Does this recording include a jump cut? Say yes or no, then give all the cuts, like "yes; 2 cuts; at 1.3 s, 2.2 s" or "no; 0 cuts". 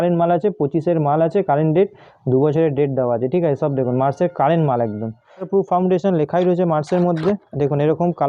yes; 1 cut; at 5.5 s